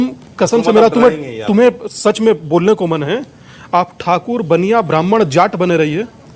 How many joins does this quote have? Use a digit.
0